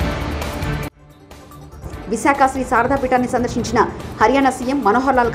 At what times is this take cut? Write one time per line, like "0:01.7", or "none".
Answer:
0:01.1